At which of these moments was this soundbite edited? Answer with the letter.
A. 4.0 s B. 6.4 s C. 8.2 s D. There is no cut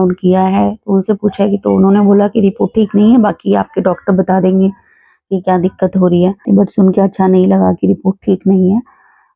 B